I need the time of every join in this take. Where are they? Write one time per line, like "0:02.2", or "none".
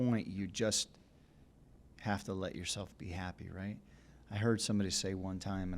none